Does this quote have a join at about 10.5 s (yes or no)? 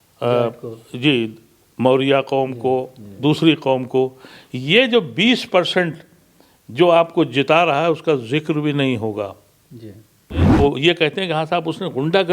yes